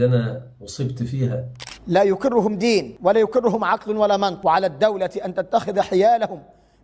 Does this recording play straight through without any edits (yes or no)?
no